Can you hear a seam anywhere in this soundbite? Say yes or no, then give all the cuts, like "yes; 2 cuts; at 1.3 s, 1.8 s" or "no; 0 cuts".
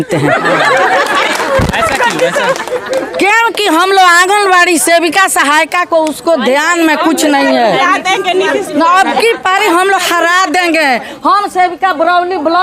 no; 0 cuts